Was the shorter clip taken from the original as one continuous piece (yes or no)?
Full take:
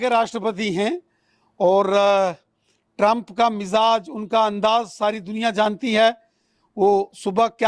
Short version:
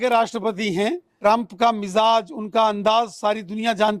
no